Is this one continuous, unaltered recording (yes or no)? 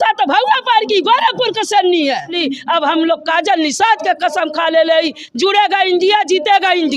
no